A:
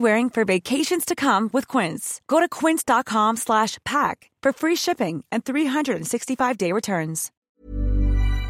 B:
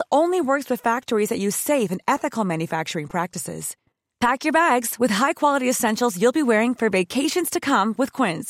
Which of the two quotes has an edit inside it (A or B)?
A